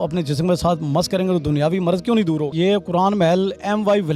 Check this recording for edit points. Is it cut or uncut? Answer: cut